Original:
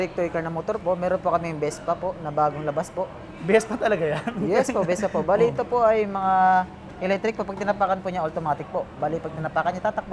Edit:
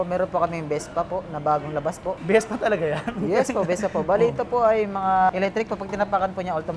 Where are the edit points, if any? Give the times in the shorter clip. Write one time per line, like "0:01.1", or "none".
0:02.2
0:05.3